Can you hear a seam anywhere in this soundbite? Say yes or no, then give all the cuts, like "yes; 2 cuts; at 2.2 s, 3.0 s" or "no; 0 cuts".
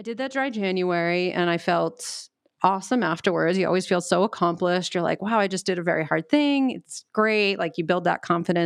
no; 0 cuts